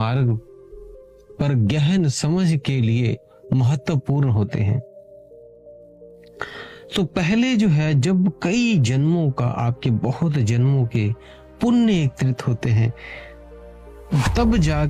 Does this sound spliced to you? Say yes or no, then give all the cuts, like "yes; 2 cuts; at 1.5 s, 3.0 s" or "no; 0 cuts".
no; 0 cuts